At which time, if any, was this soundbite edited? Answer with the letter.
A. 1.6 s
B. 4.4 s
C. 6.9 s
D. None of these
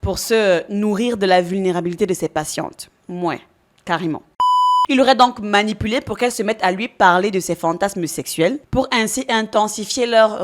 B